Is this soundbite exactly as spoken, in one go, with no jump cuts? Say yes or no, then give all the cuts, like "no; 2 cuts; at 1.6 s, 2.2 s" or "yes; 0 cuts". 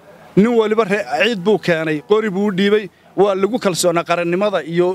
yes; 0 cuts